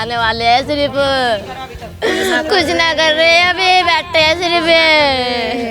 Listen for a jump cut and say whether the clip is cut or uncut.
uncut